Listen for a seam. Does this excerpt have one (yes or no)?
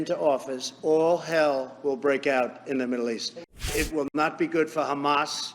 yes